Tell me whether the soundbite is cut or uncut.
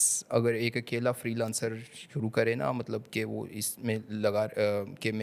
uncut